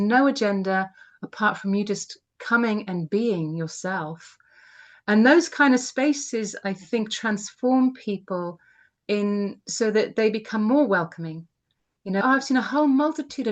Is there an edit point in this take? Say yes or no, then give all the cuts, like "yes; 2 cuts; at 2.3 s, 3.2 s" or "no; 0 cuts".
yes; 1 cut; at 12.2 s